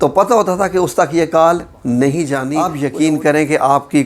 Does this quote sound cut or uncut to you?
cut